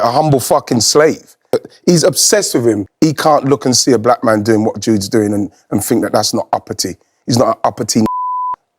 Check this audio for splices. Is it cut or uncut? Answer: cut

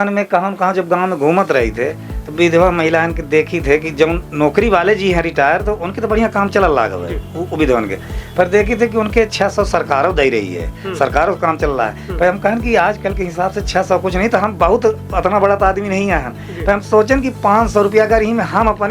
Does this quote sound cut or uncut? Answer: uncut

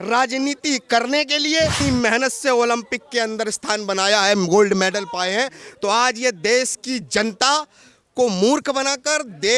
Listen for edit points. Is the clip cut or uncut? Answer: cut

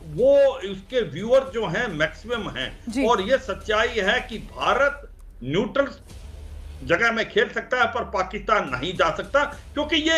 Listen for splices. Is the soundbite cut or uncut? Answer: uncut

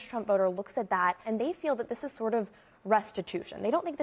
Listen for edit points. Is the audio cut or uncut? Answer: cut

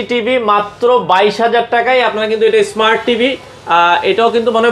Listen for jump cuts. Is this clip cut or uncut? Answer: uncut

